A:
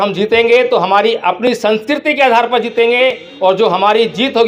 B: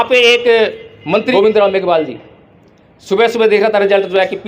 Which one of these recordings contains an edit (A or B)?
B